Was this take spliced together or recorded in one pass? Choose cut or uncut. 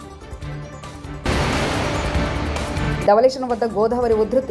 cut